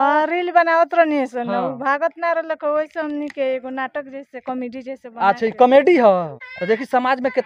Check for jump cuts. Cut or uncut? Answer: uncut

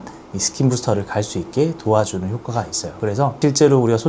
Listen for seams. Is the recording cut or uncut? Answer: uncut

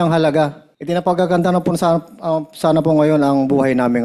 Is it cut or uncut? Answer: cut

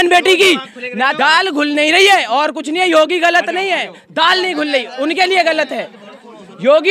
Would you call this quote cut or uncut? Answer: cut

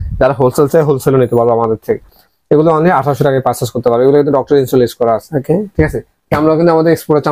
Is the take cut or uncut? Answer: uncut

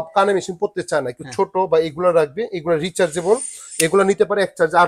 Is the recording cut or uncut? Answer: uncut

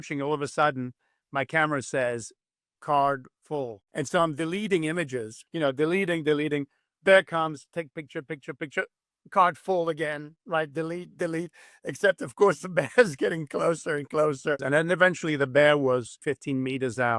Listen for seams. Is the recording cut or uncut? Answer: cut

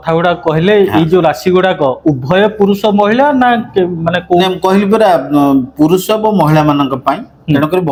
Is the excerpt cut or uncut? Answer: uncut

